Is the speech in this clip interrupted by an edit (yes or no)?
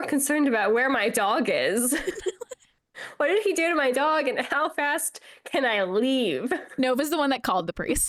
no